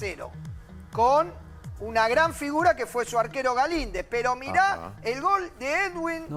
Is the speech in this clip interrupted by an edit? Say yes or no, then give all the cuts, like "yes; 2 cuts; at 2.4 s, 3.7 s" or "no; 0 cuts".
no; 0 cuts